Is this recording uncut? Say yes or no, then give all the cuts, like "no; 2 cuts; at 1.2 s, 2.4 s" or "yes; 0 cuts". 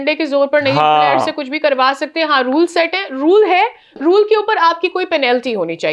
yes; 0 cuts